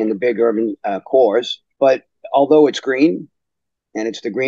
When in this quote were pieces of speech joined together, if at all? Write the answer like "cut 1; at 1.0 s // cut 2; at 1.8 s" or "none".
cut 1; at 1.6 s